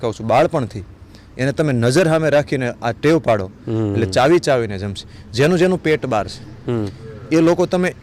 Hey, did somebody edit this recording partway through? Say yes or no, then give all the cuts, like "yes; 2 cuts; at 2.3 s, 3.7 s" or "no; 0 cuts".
no; 0 cuts